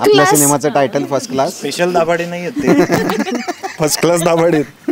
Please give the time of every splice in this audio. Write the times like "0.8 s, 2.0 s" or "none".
none